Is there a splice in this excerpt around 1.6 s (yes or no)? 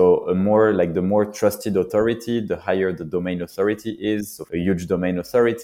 no